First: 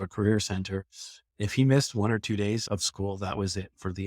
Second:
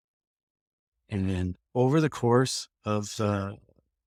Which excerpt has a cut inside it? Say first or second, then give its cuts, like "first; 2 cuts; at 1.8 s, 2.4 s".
first; 1 cut; at 2.6 s